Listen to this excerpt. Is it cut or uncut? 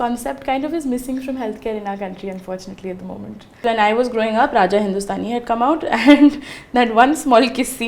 cut